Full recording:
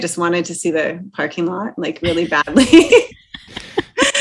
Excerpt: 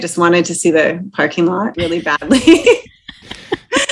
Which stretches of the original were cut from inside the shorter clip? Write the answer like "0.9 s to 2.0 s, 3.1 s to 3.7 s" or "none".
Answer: 1.7 s to 2.0 s